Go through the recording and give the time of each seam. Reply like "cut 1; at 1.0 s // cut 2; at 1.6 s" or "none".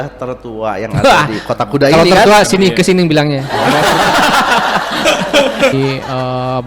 cut 1; at 5.7 s